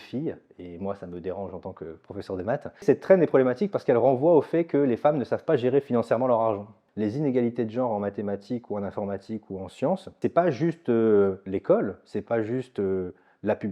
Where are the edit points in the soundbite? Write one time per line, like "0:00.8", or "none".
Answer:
0:02.8
0:06.8
0:10.2